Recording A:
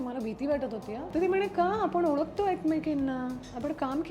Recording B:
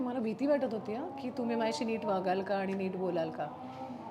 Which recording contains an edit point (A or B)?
A